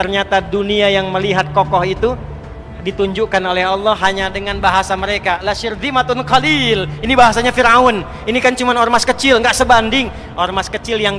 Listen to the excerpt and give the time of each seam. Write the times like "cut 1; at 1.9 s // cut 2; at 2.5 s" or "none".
none